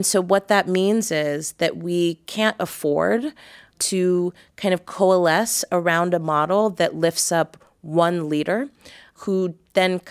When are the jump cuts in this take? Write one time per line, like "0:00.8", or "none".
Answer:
0:03.7
0:09.1

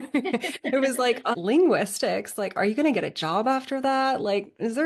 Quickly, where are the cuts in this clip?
0:01.3

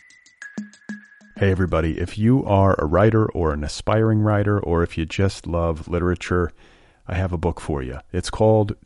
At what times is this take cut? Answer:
0:00.9

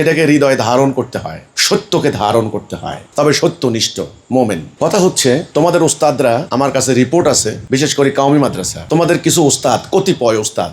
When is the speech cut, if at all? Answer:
none

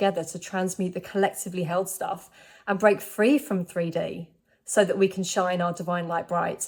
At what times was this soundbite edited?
none

